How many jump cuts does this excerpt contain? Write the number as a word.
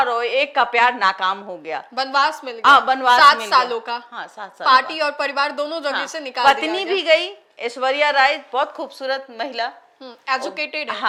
zero